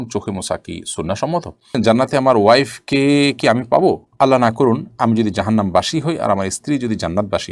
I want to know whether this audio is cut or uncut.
cut